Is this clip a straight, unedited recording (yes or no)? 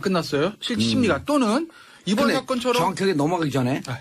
yes